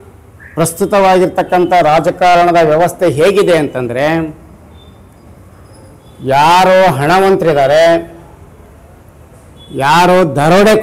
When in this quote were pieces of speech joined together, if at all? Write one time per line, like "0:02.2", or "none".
none